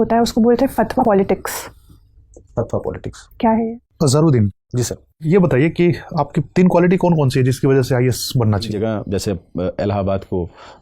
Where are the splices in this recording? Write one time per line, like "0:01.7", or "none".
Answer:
0:01.0
0:03.7
0:08.7